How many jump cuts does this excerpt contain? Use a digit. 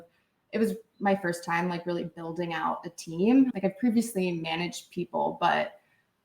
1